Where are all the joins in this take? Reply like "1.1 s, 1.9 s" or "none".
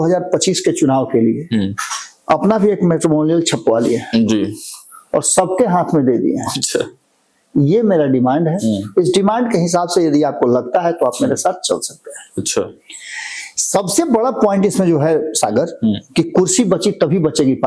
none